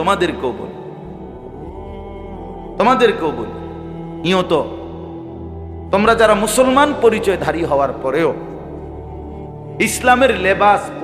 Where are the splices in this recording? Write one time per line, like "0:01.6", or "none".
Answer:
0:08.4
0:09.8